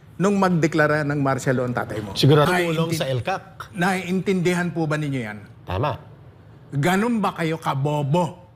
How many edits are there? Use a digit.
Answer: 1